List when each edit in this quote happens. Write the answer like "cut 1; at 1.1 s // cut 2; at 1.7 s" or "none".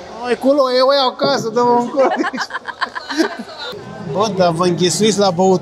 cut 1; at 3.6 s